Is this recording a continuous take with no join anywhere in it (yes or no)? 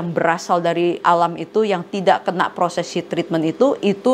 no